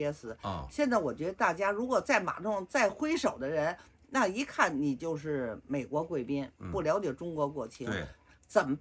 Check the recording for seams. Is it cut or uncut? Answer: uncut